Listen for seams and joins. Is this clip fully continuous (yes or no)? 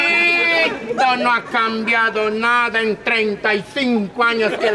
yes